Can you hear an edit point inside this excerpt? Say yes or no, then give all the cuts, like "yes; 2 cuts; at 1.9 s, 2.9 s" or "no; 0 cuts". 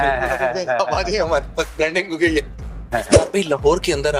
yes; 1 cut; at 3.1 s